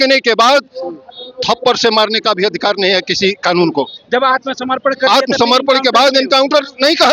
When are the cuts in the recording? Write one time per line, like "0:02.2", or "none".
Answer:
none